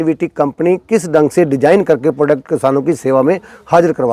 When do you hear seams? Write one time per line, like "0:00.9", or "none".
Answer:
none